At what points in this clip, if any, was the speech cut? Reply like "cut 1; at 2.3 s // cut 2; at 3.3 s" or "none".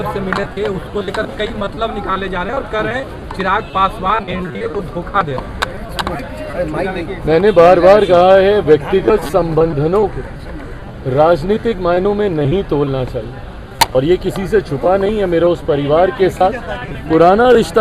none